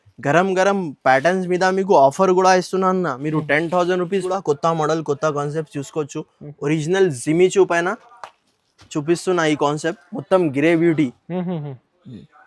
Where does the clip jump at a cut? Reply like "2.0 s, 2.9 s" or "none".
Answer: 4.2 s